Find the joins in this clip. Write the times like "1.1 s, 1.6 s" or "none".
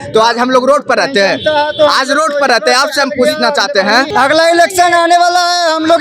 4.1 s